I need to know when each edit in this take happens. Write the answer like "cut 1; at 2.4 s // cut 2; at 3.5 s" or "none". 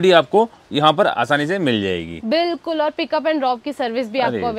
none